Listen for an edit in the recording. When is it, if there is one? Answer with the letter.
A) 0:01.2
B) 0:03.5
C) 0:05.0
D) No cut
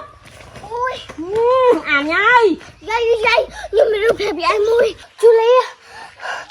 C